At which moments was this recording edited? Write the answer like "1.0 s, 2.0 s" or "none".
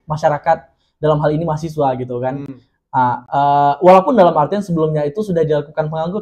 none